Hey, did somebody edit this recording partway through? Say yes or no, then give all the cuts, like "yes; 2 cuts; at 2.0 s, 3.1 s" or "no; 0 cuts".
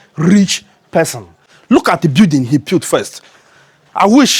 no; 0 cuts